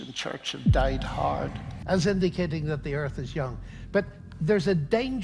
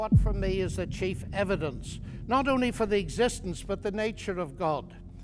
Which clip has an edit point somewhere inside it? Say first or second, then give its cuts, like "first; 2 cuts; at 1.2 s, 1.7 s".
first; 1 cut; at 1.8 s